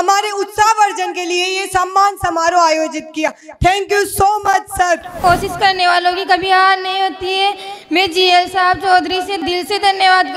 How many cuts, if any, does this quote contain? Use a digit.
2